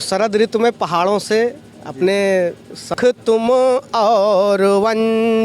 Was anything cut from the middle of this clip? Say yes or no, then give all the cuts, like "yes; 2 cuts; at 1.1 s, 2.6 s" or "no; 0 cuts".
yes; 1 cut; at 2.9 s